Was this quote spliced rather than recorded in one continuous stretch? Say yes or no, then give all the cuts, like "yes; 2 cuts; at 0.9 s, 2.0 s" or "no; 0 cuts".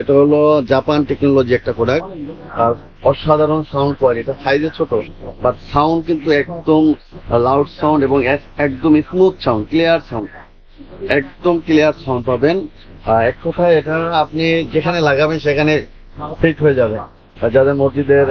no; 0 cuts